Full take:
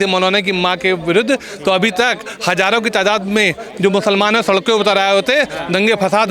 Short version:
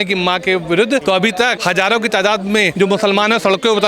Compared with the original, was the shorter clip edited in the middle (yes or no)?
yes